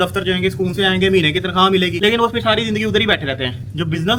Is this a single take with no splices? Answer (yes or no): yes